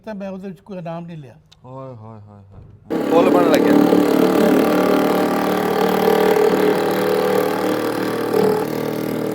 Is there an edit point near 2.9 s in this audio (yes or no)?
yes